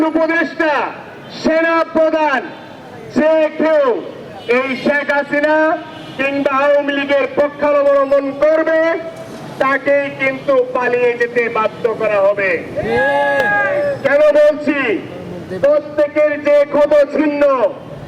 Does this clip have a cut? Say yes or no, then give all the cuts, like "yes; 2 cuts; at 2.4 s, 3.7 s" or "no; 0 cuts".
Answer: no; 0 cuts